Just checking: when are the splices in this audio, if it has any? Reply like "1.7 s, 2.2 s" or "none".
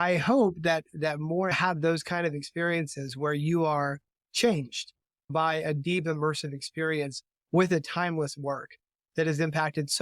1.5 s